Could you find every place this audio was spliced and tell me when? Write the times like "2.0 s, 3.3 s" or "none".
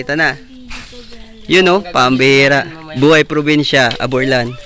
2.8 s